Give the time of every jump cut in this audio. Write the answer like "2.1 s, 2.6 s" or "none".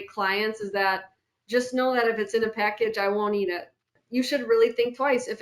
4.0 s

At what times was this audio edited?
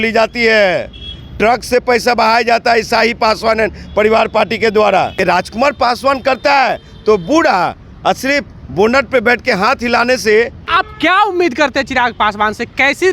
5.2 s, 10.6 s

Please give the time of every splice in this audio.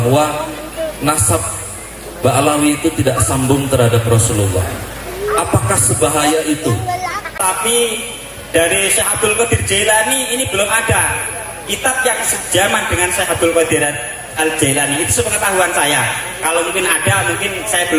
7.4 s

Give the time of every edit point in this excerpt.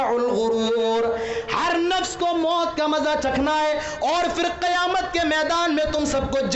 none

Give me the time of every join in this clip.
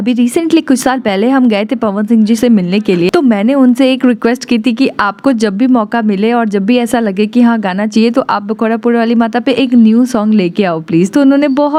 none

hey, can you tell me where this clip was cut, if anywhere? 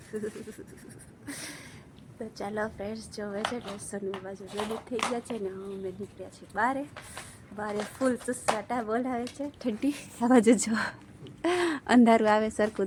none

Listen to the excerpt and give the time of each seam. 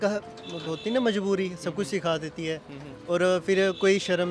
none

